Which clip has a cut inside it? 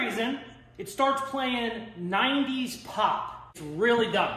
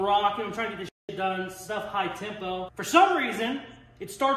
first; 1 cut; at 3.4 s

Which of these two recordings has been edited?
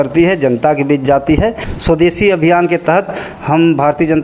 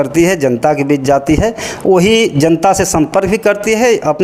first; 1 cut; at 1.7 s

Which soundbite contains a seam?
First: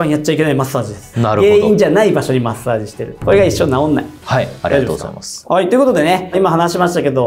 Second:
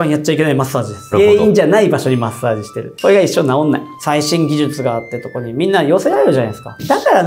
second; 2 cuts; at 1.1 s, 3.9 s

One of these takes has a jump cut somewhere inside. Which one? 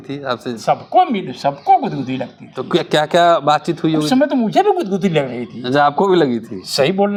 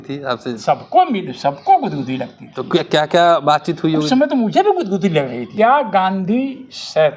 second; 1 cut; at 5.4 s

